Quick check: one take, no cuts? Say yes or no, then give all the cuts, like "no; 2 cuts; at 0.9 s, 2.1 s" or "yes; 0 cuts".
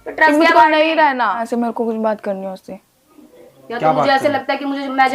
no; 1 cut; at 1.4 s